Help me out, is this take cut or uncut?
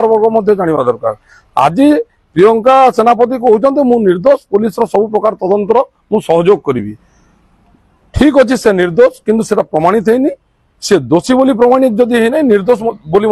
uncut